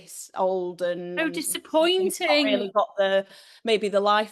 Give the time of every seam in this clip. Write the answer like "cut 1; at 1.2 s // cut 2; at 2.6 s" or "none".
none